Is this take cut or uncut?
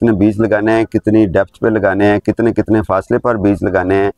uncut